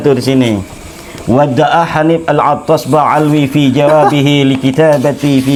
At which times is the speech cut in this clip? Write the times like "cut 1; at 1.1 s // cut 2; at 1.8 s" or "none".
none